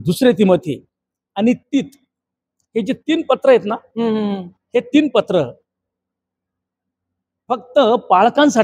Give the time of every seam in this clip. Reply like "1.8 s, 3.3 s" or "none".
none